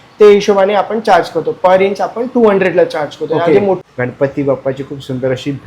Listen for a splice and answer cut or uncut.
cut